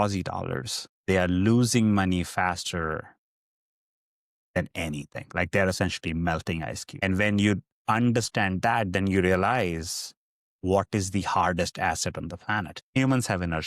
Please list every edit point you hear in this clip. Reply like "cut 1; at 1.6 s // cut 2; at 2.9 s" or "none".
cut 1; at 6.8 s // cut 2; at 12.8 s

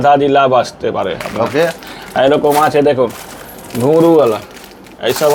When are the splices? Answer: none

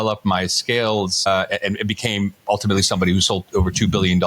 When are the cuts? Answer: cut 1; at 1.3 s

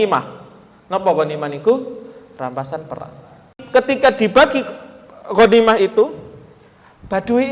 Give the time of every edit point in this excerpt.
cut 1; at 3.6 s

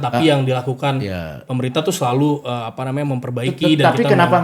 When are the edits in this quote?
none

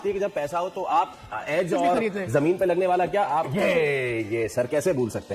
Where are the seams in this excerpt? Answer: none

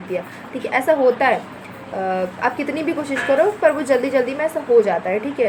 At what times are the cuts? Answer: none

